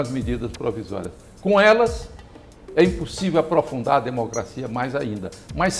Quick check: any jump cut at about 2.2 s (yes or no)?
no